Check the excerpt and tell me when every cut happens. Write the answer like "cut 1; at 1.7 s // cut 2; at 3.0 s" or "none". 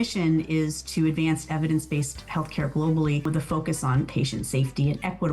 cut 1; at 3.3 s